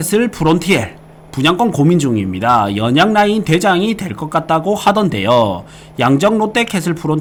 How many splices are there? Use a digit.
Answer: 0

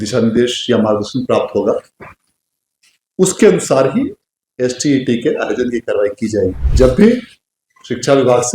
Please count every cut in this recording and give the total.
1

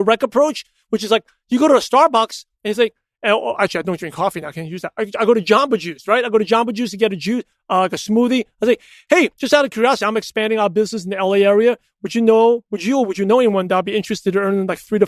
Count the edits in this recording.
0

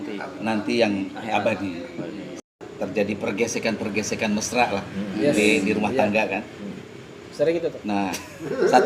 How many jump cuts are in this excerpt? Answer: 1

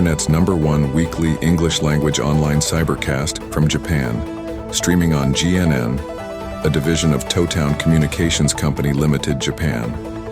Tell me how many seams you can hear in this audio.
1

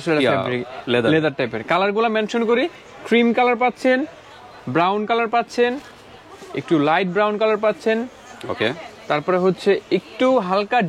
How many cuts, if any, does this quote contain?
0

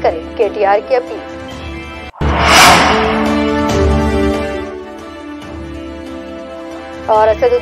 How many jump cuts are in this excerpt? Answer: 0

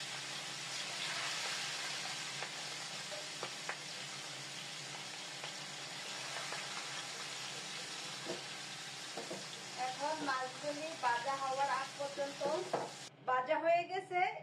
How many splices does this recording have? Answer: 1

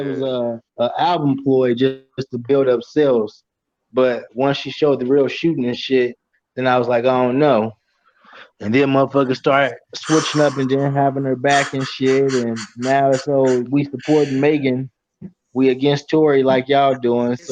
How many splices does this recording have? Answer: 0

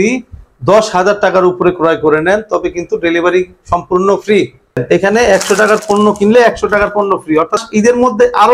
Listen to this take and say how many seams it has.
2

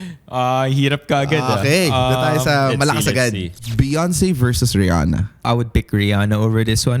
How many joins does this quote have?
2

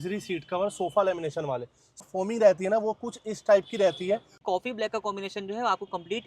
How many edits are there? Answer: 2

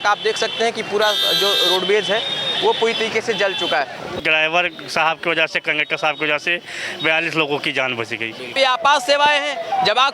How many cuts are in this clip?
2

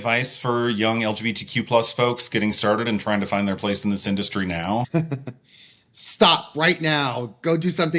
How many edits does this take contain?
0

